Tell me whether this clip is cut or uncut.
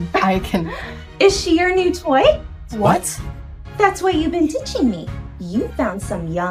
uncut